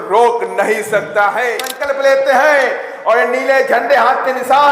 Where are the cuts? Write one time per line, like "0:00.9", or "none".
0:01.7